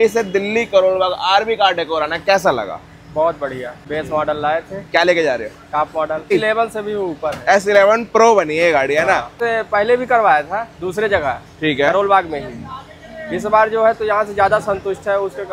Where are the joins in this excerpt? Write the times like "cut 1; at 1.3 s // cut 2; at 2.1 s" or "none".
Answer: cut 1; at 3.8 s // cut 2; at 6.3 s // cut 3; at 9.4 s